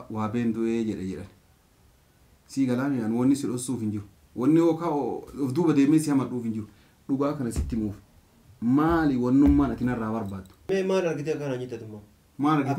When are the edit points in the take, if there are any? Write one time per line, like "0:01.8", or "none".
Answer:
0:10.6